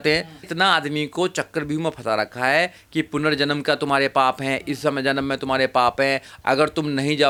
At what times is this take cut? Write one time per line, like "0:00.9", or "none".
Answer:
none